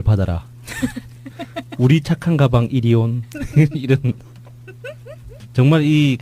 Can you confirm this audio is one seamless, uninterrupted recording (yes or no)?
yes